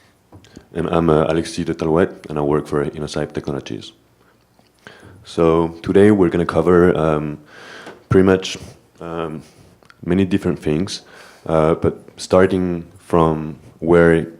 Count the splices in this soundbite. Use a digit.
1